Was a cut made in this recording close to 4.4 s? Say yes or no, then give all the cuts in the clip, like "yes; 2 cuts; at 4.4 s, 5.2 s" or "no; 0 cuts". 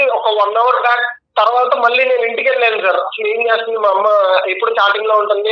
no; 0 cuts